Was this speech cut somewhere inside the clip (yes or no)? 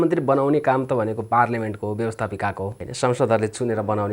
yes